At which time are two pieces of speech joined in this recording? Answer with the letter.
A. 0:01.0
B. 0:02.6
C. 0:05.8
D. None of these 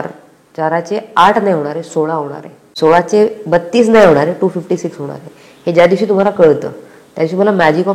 B